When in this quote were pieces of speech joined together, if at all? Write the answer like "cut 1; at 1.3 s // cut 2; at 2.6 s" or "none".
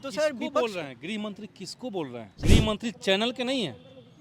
cut 1; at 2.3 s